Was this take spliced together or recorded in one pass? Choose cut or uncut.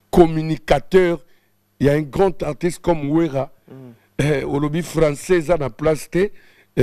uncut